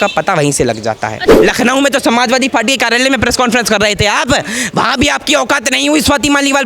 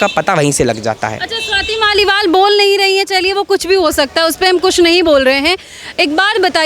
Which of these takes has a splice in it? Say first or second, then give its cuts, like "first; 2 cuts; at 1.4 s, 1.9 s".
first; 1 cut; at 1.3 s